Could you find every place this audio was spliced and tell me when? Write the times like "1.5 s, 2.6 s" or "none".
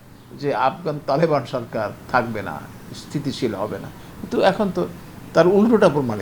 2.0 s